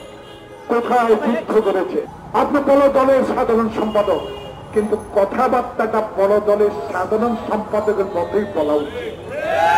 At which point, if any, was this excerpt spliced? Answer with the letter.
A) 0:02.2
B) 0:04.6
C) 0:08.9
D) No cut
A